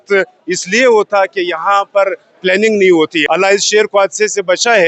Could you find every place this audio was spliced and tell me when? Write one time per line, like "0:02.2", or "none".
0:03.2